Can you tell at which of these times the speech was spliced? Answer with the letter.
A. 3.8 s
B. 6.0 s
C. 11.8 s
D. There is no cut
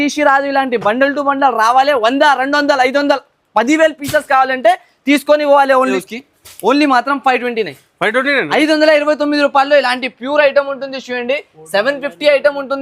B